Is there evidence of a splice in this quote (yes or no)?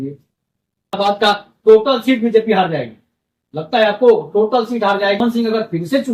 yes